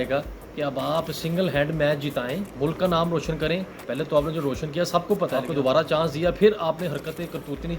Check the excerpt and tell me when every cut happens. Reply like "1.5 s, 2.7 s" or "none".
2.5 s, 5.4 s